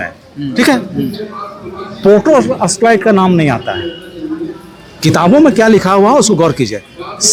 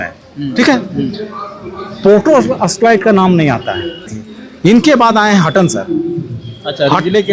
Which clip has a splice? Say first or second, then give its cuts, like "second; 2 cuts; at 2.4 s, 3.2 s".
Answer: second; 1 cut; at 4.1 s